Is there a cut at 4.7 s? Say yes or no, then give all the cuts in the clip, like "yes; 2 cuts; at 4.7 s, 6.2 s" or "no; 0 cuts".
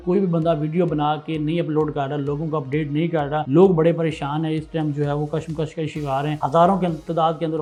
no; 0 cuts